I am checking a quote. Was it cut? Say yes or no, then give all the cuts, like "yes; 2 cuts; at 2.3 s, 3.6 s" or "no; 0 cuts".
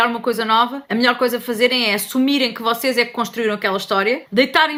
no; 0 cuts